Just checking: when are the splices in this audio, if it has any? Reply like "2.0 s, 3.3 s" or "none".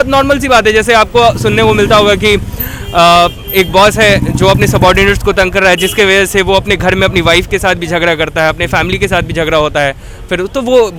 none